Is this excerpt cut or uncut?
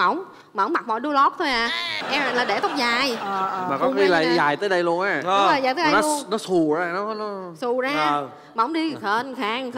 uncut